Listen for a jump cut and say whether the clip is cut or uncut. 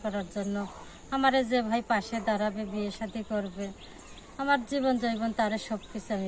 uncut